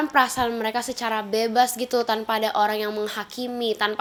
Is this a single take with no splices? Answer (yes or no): yes